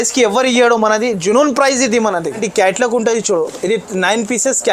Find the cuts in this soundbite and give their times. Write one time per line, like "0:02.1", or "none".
0:02.4